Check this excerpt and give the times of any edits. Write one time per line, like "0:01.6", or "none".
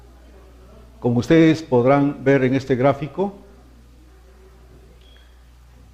none